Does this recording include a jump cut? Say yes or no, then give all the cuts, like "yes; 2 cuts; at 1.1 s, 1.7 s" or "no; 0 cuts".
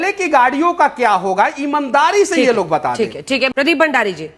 no; 0 cuts